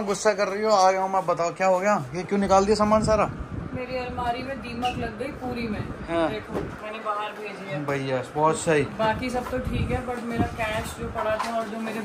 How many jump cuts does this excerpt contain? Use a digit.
0